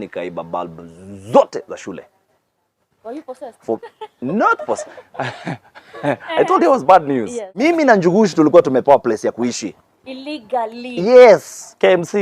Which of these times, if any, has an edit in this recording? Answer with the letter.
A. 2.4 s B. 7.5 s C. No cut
B